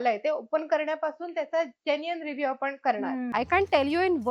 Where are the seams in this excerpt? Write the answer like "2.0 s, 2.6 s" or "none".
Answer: 3.3 s

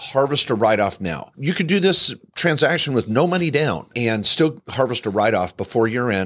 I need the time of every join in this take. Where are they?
1.3 s, 4.6 s

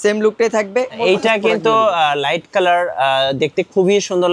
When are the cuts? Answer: 1.0 s

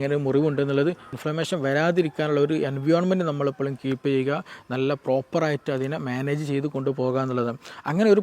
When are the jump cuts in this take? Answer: 1.1 s

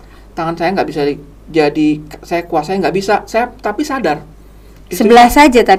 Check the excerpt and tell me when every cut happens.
none

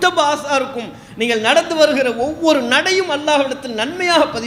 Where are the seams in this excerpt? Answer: none

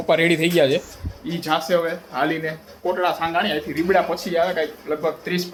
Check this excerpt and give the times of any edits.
none

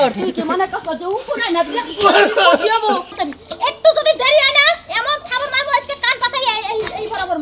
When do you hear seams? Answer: 3.2 s

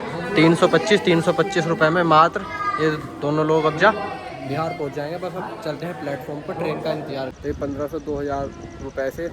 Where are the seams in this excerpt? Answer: 7.3 s

